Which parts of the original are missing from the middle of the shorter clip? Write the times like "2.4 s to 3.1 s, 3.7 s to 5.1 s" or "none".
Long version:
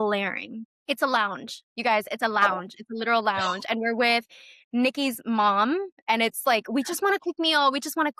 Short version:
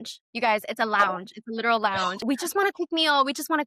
3.6 s to 6.7 s